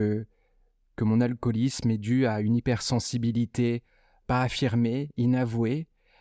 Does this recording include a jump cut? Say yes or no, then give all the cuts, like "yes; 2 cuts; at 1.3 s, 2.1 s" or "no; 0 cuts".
no; 0 cuts